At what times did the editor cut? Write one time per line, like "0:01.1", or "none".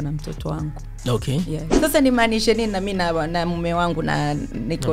0:01.7